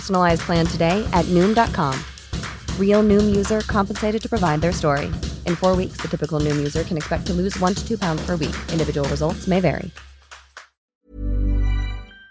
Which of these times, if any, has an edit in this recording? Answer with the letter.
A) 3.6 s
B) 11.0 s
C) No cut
B